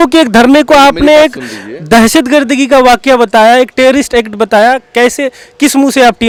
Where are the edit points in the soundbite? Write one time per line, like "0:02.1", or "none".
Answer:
none